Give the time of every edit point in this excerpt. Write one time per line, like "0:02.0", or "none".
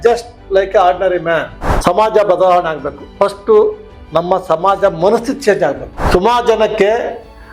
0:01.6
0:06.0